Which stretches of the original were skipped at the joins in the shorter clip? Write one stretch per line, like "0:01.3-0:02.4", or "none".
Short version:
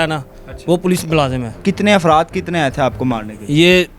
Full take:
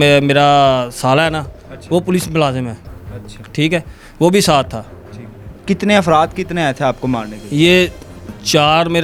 0:02.7-0:05.5